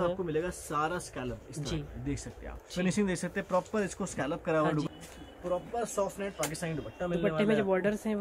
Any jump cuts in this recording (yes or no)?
yes